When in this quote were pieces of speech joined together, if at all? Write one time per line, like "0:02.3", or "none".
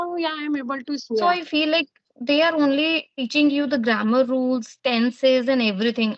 0:01.0